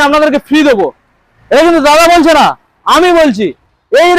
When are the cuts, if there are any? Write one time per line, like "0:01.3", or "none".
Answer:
none